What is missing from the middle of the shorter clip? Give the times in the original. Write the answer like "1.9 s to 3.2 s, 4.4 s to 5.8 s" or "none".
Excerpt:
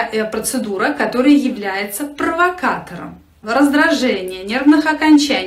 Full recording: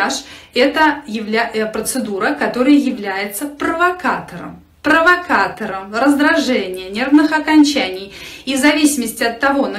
4.7 s to 5.7 s